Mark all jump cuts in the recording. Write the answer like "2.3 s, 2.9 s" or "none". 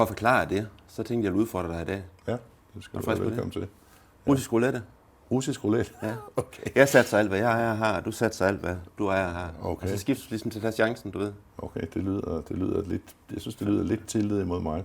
none

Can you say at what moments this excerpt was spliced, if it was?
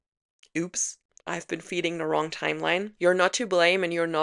none

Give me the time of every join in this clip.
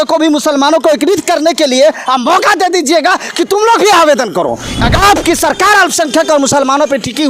4.8 s

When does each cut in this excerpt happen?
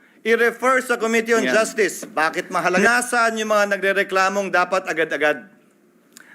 2.8 s

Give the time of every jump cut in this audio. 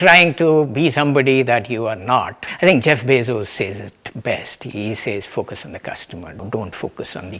2.4 s, 6.4 s

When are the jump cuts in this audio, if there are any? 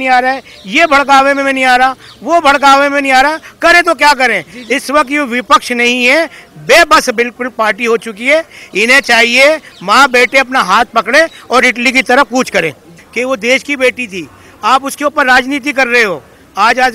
13.0 s

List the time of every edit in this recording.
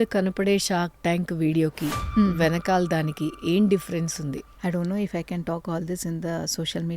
4.5 s

